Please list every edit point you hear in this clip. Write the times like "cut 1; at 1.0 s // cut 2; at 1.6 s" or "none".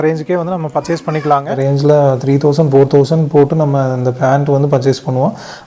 cut 1; at 1.5 s